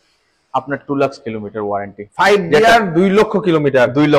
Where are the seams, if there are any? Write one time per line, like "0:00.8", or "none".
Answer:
none